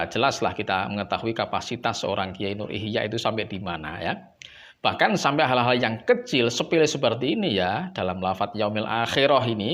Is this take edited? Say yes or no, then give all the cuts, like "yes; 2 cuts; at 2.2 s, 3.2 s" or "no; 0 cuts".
no; 0 cuts